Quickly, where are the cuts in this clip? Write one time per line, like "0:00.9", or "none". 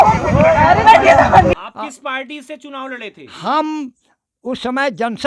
0:01.5

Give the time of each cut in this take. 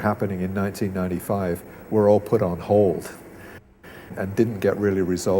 0:04.0

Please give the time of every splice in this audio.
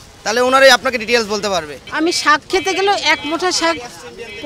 0:01.8

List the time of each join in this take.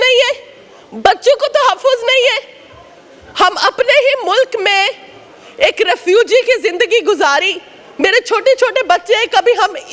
none

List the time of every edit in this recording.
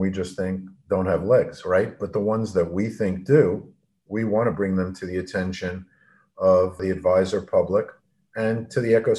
0:06.8

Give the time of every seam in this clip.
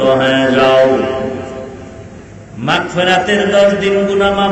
none

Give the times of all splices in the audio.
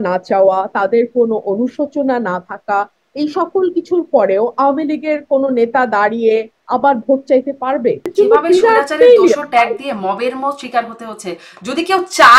0:08.1

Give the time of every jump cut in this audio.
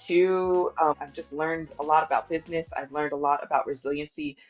0:00.9

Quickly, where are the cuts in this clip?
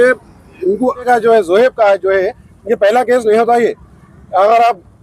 0:01.1

